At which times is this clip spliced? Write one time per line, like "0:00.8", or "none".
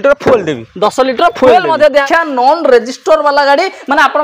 0:02.0